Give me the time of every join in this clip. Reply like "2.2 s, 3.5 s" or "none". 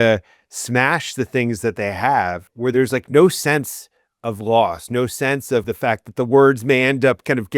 2.8 s, 5.7 s